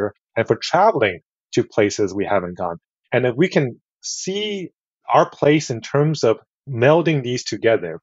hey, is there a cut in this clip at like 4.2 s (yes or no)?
no